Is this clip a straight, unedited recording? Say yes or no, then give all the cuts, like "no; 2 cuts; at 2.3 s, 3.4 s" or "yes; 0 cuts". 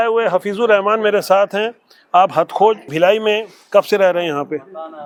yes; 0 cuts